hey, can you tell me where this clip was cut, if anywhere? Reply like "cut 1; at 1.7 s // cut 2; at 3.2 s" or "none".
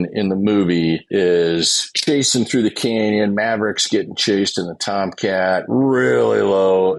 cut 1; at 1.0 s // cut 2; at 1.8 s